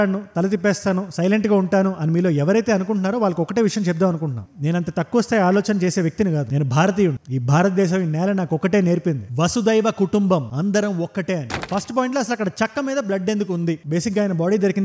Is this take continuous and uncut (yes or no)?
no